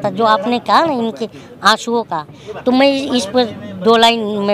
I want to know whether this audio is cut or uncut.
uncut